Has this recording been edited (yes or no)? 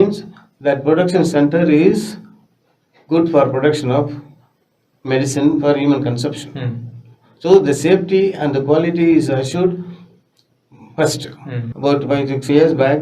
yes